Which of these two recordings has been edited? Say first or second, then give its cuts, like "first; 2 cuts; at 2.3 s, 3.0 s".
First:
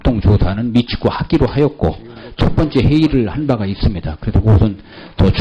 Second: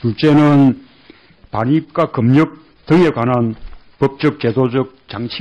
second; 1 cut; at 1.7 s